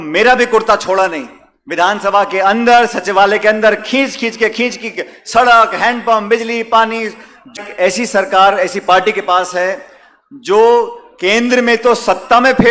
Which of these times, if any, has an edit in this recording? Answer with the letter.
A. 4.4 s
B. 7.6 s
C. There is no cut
B